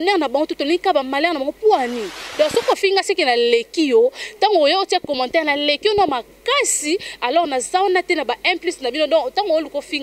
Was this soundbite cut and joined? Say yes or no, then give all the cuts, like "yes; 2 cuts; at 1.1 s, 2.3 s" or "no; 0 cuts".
yes; 1 cut; at 2.2 s